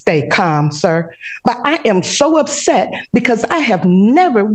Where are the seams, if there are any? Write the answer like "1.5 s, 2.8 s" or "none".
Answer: none